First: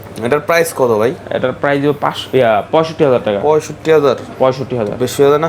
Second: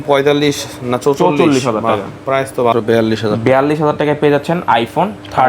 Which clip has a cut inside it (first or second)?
second